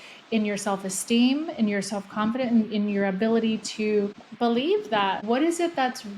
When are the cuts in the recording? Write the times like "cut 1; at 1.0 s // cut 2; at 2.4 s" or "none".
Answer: cut 1; at 5.2 s

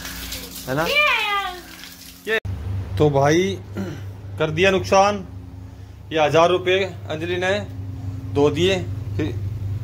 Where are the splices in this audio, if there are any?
cut 1; at 2.4 s

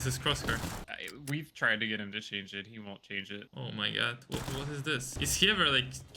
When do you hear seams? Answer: cut 1; at 0.9 s // cut 2; at 3.5 s // cut 3; at 5.1 s

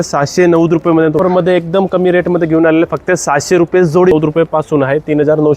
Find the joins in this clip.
cut 1; at 1.2 s // cut 2; at 4.1 s

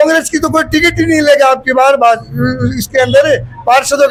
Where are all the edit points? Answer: none

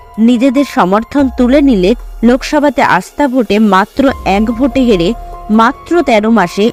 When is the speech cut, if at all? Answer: none

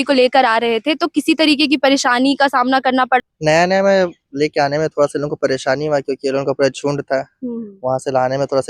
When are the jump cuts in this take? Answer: cut 1; at 3.2 s

